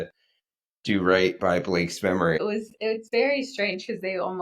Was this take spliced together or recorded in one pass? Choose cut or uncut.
cut